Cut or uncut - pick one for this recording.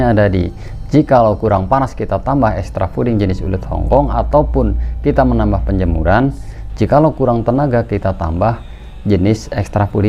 uncut